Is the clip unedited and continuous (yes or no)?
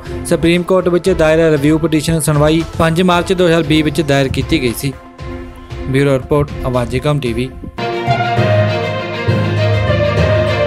no